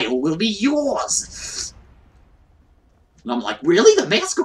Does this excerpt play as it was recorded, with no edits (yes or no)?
yes